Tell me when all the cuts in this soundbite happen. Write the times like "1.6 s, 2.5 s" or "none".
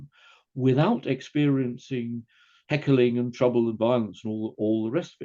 none

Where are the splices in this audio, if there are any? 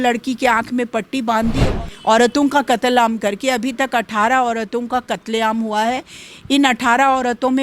1.7 s

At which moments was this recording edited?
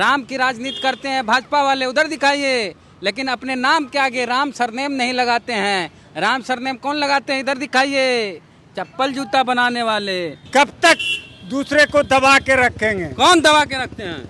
10.4 s

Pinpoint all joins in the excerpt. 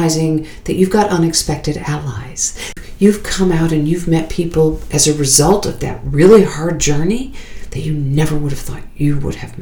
2.7 s

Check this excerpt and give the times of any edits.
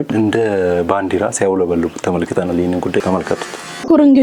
none

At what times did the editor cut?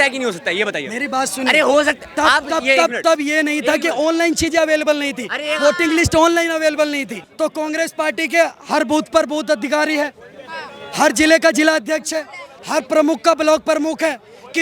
7.2 s

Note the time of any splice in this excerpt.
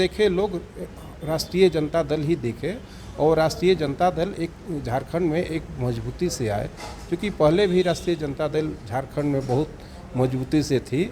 none

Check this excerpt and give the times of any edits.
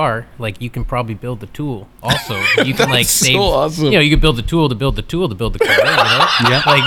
none

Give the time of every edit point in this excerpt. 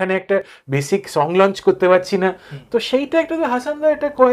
none

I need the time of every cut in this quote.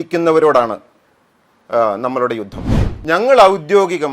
2.7 s

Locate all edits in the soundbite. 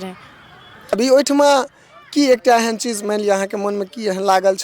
1.0 s

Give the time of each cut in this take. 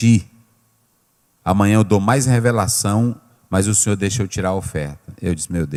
none

